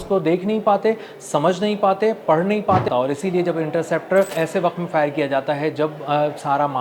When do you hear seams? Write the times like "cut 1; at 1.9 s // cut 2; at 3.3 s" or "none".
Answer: cut 1; at 2.9 s // cut 2; at 4.3 s